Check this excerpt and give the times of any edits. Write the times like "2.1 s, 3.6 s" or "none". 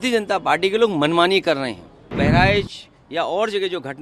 2.1 s